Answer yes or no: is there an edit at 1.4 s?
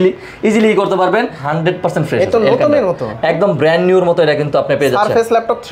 yes